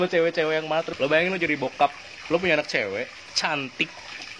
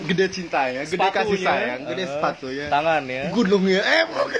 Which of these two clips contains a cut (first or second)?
first